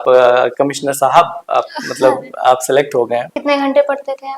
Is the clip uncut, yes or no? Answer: no